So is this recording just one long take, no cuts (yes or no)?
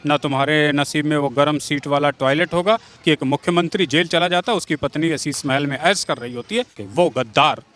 no